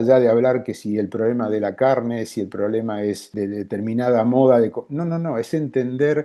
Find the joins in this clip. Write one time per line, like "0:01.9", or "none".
0:03.3